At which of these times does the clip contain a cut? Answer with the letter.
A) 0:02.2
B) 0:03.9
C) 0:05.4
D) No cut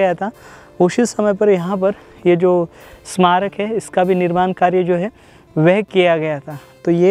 D